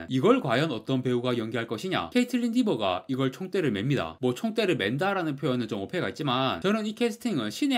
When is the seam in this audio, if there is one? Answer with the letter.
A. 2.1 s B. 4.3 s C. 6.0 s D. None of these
A